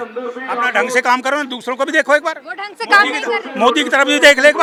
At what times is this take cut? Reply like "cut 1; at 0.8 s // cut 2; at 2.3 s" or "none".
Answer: none

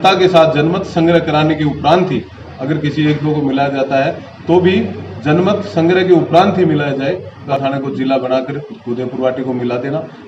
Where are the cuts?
cut 1; at 7.4 s

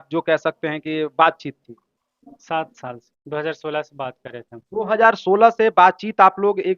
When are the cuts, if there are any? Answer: none

